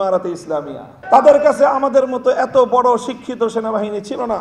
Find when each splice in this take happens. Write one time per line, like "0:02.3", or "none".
0:00.9